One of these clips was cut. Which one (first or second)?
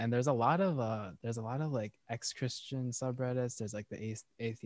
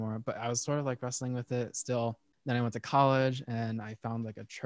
second